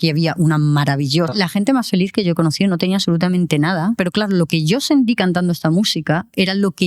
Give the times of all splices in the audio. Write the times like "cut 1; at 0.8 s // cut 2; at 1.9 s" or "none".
cut 1; at 1.3 s // cut 2; at 4.0 s